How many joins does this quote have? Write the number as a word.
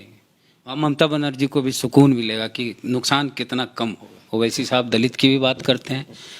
one